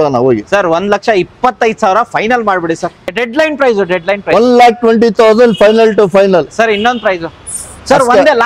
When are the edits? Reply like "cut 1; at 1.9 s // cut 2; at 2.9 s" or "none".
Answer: cut 1; at 3.0 s